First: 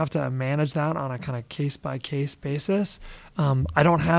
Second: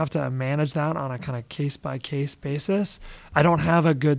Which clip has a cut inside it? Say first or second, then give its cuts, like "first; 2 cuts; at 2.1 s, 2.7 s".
second; 1 cut; at 3.2 s